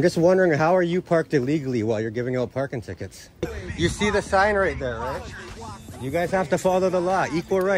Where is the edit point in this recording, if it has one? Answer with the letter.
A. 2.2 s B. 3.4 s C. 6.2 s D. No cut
B